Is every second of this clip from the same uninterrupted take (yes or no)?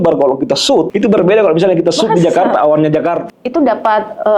no